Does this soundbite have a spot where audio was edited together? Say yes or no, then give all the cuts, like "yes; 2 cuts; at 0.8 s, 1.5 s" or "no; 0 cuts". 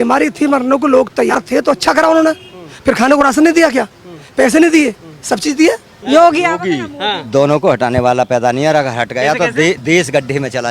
yes; 2 cuts; at 1.3 s, 5.9 s